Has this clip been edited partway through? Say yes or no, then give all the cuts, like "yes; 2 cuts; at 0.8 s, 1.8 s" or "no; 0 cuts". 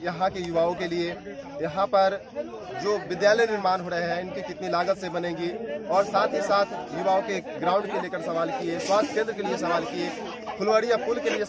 no; 0 cuts